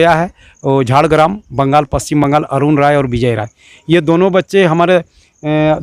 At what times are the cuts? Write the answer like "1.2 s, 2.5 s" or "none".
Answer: none